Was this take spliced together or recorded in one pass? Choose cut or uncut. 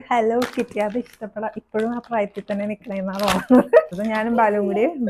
cut